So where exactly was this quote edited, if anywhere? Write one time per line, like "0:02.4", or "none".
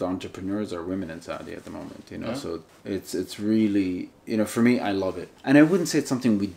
0:02.7
0:04.1
0:05.3